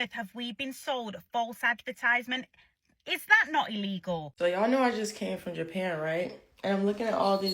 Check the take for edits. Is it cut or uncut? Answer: cut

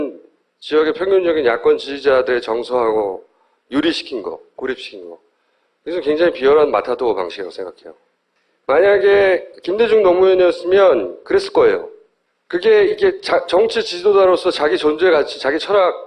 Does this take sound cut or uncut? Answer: uncut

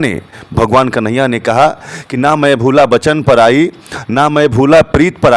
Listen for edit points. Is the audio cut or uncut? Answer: uncut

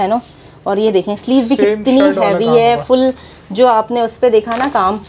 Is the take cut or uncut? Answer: uncut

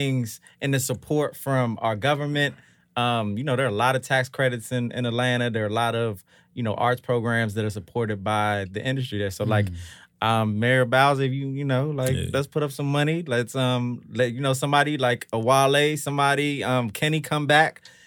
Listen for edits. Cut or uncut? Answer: uncut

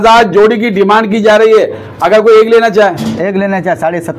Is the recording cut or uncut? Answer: uncut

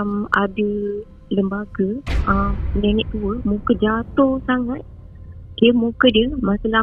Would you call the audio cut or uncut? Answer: uncut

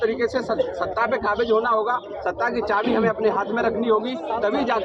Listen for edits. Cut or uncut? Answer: uncut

